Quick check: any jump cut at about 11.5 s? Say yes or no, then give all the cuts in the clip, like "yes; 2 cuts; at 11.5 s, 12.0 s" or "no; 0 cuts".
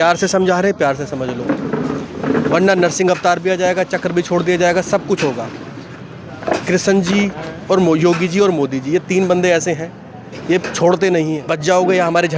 yes; 1 cut; at 11.5 s